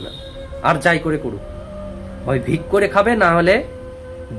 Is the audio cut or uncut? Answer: uncut